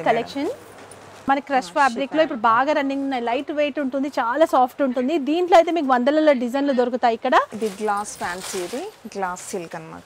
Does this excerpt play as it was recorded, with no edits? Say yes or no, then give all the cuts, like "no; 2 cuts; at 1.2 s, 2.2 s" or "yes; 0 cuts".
no; 2 cuts; at 1.1 s, 7.5 s